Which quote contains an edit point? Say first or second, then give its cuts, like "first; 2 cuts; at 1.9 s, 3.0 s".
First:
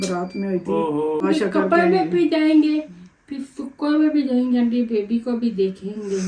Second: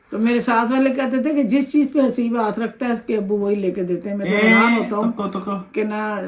first; 1 cut; at 1.2 s